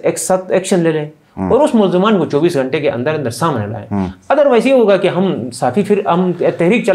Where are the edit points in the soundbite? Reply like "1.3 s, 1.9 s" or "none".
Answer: none